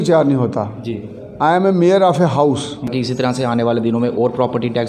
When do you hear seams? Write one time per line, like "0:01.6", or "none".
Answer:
0:02.9